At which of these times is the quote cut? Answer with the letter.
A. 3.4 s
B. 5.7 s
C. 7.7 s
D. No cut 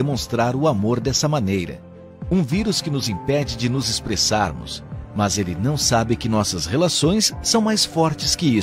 D